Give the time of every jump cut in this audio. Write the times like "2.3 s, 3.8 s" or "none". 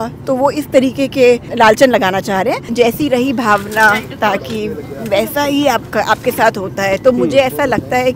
1.5 s, 2.7 s